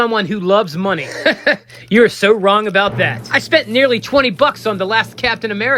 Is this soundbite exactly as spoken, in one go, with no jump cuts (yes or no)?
yes